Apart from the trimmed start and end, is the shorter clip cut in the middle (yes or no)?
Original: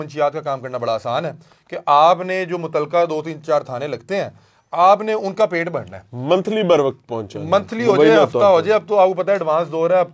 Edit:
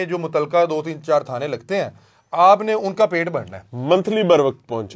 no